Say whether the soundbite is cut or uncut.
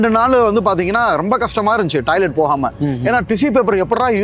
uncut